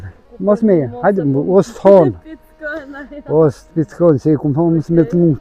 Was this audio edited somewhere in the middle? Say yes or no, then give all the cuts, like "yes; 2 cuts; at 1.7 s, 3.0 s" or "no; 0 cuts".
no; 0 cuts